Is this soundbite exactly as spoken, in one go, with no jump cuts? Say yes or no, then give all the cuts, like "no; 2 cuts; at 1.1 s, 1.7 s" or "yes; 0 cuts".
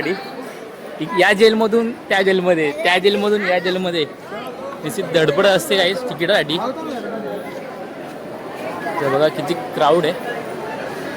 yes; 0 cuts